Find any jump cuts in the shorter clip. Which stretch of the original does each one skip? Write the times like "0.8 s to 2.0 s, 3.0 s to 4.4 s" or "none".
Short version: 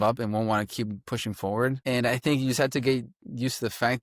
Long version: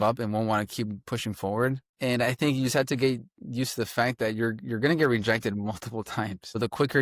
1.8 s to 1.9 s